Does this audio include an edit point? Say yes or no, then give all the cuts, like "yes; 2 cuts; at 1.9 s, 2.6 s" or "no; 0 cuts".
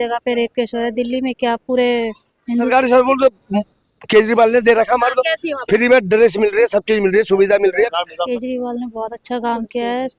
yes; 2 cuts; at 2.7 s, 8.2 s